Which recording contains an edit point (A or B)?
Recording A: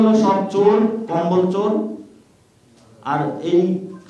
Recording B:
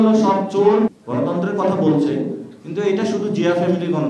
B